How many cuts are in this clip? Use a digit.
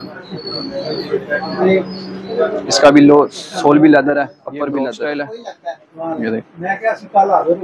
1